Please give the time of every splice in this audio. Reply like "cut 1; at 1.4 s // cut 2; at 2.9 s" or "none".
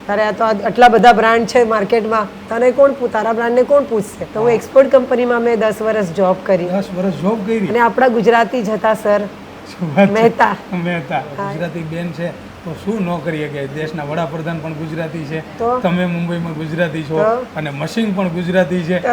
cut 1; at 4.2 s // cut 2; at 11.3 s